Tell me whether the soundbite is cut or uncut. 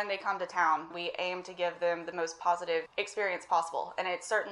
cut